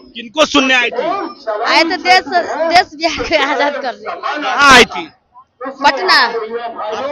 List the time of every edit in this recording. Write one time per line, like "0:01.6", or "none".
none